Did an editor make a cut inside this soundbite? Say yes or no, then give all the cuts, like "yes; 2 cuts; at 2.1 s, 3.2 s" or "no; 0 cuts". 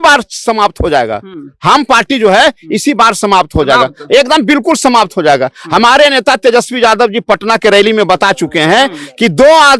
no; 0 cuts